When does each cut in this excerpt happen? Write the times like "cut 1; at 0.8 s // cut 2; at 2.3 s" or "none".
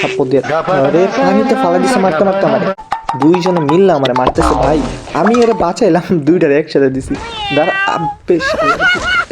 cut 1; at 2.8 s